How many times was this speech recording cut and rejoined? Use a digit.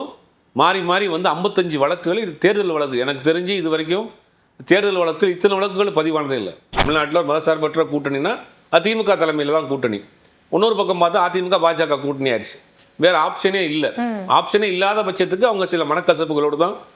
1